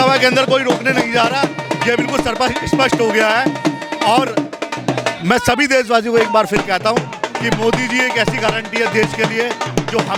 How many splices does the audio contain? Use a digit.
0